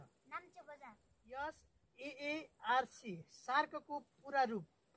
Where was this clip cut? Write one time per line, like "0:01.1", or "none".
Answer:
0:01.1